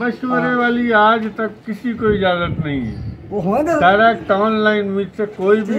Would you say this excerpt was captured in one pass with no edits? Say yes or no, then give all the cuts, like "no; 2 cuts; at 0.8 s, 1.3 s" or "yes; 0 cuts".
yes; 0 cuts